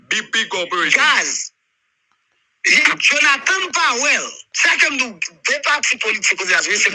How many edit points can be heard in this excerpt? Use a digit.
0